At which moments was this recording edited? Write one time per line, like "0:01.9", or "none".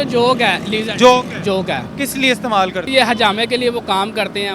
0:01.9
0:02.9